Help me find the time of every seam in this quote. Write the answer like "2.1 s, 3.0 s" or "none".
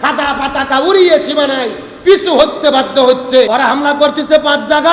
3.5 s